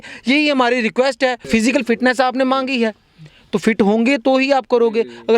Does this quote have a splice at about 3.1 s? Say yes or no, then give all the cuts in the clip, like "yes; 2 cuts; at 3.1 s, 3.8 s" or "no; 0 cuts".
no; 1 cut; at 1.5 s